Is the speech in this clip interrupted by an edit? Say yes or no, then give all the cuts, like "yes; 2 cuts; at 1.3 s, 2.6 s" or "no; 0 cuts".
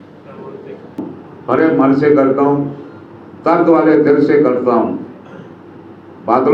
yes; 1 cut; at 1.1 s